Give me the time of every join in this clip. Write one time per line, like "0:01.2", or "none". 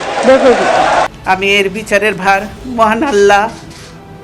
0:01.1